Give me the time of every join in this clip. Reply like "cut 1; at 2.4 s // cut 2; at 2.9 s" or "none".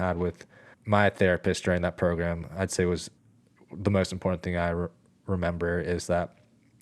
cut 1; at 3.2 s